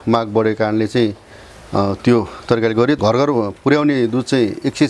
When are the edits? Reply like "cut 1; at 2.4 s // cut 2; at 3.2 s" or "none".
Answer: cut 1; at 3.0 s